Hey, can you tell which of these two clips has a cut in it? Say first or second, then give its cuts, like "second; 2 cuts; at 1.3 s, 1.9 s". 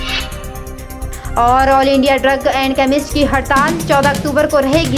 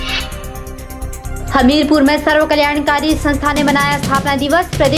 second; 1 cut; at 1.1 s